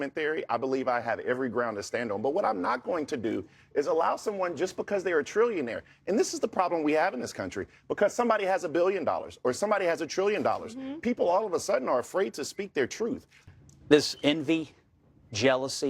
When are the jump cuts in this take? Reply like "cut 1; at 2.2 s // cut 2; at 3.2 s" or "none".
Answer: cut 1; at 13.3 s